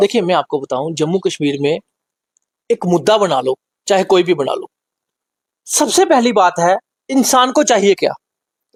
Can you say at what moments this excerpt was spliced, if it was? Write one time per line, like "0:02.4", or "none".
none